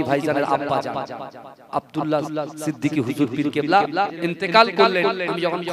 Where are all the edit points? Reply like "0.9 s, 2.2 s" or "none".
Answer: 4.1 s